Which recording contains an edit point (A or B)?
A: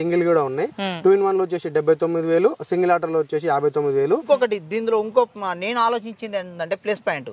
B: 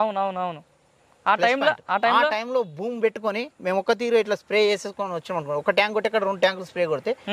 A